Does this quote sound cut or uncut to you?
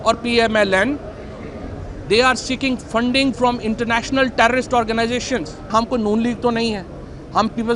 cut